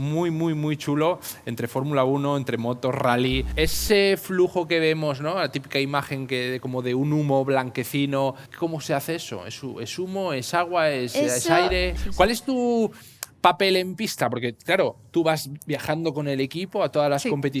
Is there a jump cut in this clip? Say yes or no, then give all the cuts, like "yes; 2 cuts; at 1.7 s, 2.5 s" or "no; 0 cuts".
yes; 3 cuts; at 3.5 s, 8.5 s, 11.9 s